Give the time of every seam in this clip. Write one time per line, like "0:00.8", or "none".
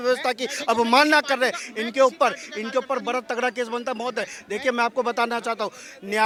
none